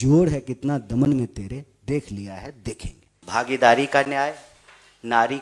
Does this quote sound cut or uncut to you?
cut